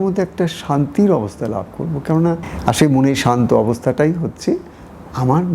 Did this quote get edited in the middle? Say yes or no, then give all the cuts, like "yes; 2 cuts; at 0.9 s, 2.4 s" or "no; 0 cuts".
yes; 1 cut; at 2.5 s